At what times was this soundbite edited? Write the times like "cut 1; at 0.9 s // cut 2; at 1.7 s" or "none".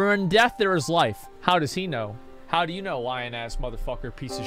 cut 1; at 1.3 s